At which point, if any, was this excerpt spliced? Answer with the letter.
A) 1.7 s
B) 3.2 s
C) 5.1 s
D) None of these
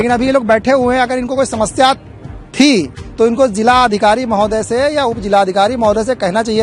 D